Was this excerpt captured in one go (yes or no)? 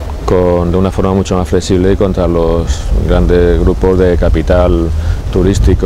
yes